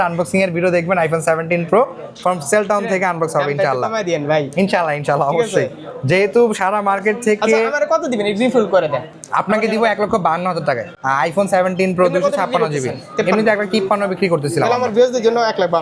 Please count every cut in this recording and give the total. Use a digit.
0